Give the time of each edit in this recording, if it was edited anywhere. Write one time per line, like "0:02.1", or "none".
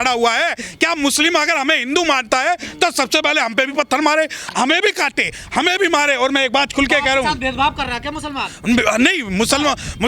none